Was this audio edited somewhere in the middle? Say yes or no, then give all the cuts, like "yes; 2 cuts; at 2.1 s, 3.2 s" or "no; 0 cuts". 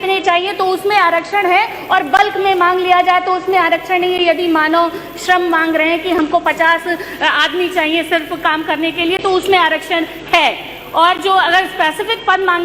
no; 0 cuts